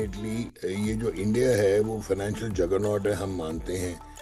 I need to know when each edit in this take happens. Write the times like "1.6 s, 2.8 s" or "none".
none

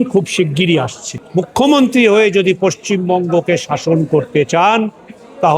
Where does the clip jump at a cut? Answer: 1.2 s

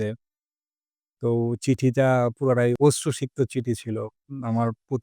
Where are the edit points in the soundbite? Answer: 2.8 s

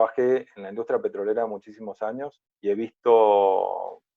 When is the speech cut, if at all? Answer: 2.4 s

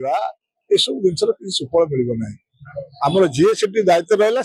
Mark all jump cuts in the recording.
none

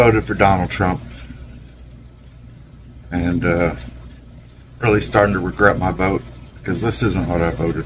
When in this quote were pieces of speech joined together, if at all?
none

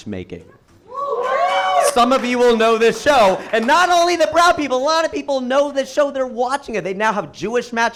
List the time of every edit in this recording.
none

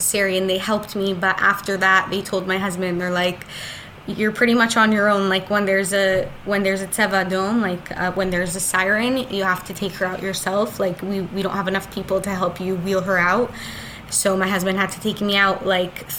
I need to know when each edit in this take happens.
none

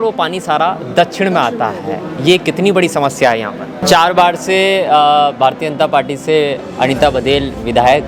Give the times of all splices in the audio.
3.8 s

